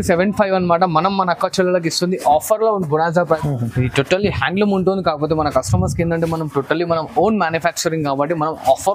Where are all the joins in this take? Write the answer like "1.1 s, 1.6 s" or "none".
3.4 s